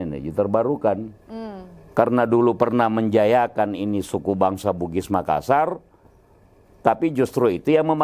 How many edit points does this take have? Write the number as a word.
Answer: zero